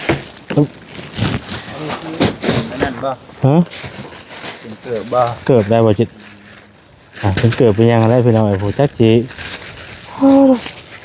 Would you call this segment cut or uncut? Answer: uncut